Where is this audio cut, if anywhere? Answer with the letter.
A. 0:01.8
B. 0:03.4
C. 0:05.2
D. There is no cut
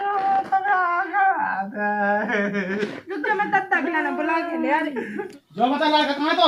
C